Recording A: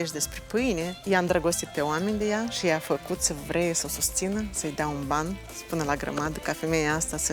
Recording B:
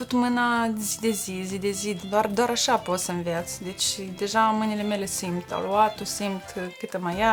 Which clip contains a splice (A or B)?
A